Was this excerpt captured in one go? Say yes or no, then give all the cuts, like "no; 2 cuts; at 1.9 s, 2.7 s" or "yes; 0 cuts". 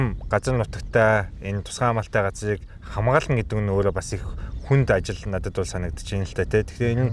yes; 0 cuts